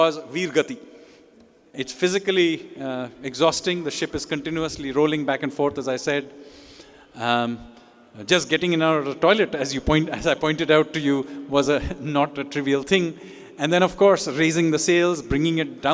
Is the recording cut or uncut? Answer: cut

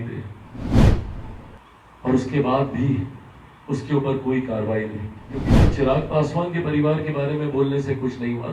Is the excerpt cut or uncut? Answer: cut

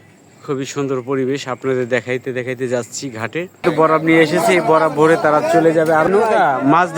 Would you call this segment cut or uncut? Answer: cut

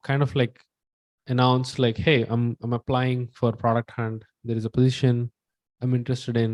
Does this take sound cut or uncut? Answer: uncut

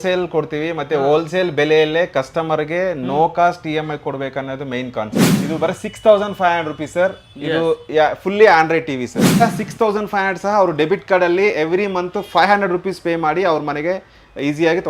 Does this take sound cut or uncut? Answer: cut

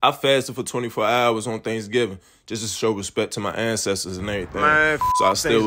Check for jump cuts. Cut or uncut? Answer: uncut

